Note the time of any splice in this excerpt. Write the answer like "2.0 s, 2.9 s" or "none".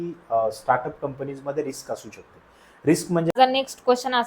3.3 s